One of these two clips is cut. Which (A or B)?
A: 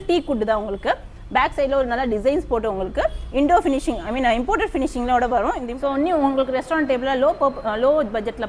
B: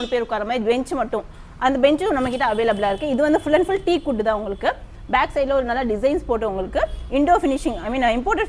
A